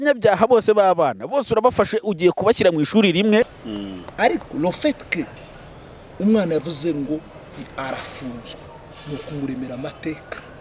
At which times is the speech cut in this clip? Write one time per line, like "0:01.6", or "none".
0:03.6